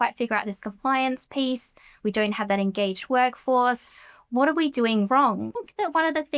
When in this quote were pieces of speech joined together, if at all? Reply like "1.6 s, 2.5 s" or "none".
5.5 s